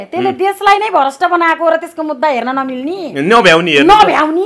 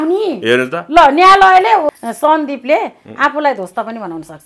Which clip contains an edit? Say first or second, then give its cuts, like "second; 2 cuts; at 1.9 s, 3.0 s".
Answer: second; 1 cut; at 1.9 s